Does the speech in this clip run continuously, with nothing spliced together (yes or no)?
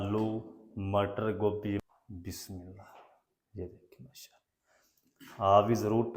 no